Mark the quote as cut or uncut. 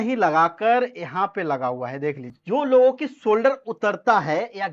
cut